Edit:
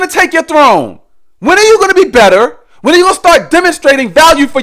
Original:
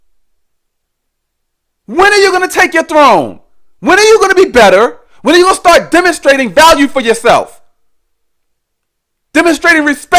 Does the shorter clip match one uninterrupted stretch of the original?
yes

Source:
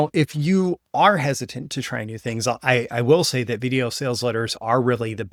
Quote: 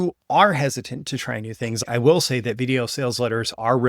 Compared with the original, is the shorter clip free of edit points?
no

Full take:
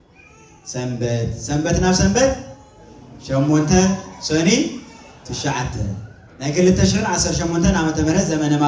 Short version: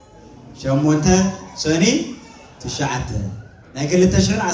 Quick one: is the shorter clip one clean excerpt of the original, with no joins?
yes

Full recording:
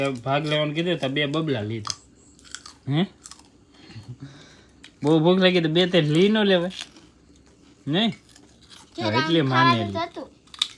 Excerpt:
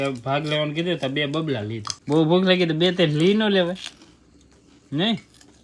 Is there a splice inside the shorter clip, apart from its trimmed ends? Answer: yes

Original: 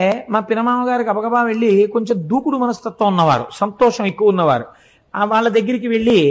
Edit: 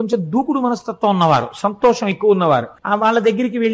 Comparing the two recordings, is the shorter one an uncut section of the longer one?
no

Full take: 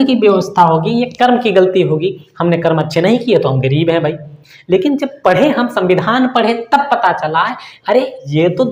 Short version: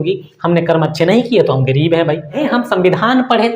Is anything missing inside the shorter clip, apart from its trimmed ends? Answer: yes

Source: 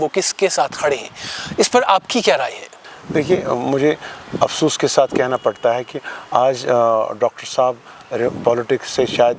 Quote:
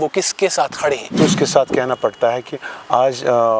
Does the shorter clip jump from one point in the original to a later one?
yes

